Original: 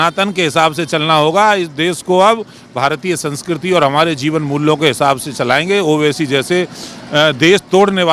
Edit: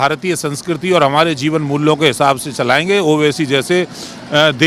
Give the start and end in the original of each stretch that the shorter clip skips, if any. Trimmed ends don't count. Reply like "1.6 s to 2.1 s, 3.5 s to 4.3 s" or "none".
none